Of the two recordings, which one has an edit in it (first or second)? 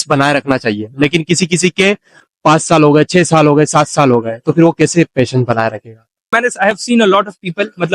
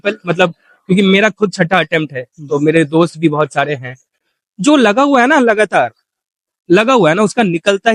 first